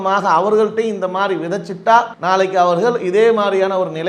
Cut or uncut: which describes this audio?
cut